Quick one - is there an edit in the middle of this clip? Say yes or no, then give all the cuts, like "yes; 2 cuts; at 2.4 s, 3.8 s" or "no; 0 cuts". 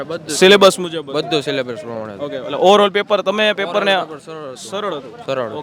no; 0 cuts